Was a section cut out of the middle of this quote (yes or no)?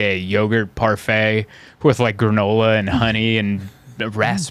no